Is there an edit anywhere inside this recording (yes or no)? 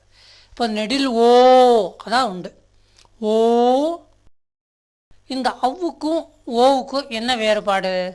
yes